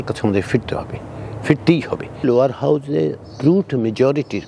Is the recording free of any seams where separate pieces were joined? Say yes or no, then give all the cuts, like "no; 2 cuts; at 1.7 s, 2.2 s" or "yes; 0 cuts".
no; 1 cut; at 2.2 s